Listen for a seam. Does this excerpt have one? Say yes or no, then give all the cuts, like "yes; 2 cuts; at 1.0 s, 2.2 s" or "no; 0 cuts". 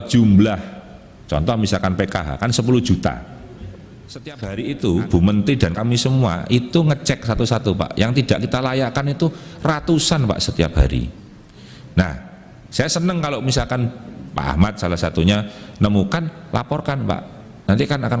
yes; 1 cut; at 4.4 s